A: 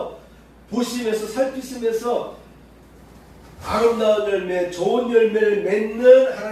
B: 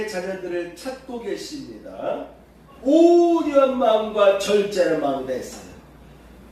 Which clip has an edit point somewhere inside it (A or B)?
B